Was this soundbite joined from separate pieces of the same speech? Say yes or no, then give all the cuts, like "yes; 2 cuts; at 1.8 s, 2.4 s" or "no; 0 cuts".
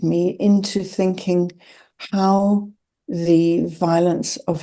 no; 0 cuts